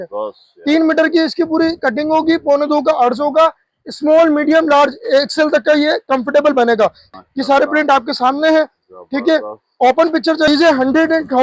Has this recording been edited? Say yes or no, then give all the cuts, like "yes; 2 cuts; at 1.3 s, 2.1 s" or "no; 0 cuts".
yes; 2 cuts; at 7.1 s, 10.5 s